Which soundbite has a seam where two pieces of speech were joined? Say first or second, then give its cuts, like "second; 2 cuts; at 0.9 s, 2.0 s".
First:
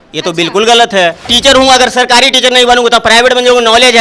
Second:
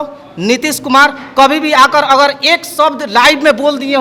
first; 1 cut; at 1.3 s